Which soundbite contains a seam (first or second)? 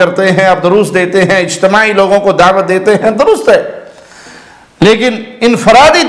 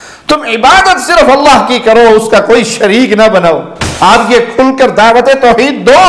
second